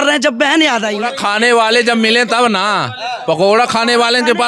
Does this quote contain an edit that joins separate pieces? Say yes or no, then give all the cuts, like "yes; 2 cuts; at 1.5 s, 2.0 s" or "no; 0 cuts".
yes; 1 cut; at 0.9 s